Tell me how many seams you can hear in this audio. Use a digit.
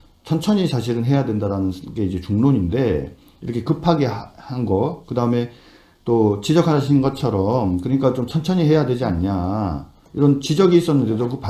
1